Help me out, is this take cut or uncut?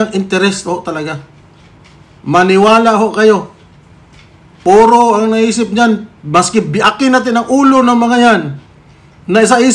uncut